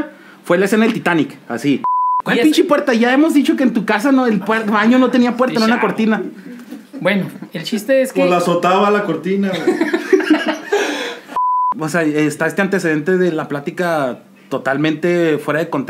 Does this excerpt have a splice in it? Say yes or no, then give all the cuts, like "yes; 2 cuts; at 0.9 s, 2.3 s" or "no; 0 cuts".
yes; 2 cuts; at 2.0 s, 11.3 s